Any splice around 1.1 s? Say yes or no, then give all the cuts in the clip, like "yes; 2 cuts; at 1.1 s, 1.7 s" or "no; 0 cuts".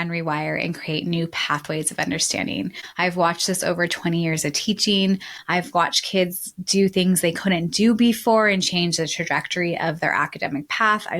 no; 2 cuts; at 2.8 s, 5.2 s